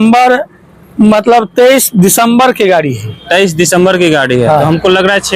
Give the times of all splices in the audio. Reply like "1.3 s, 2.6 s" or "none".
none